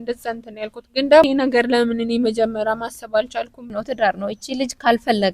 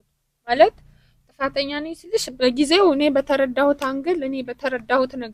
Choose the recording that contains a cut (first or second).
first